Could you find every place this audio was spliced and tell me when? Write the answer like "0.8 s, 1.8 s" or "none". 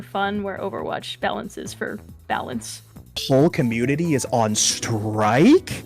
3.2 s